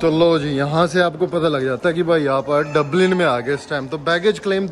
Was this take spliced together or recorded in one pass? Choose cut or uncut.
uncut